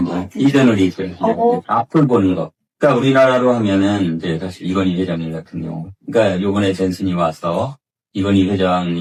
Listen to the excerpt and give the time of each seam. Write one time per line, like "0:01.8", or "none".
none